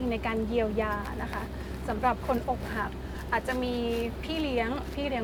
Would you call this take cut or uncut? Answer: uncut